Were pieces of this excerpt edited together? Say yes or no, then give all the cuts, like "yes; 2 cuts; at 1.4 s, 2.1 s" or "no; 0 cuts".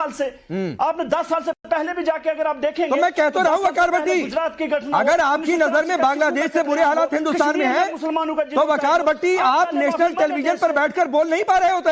no; 0 cuts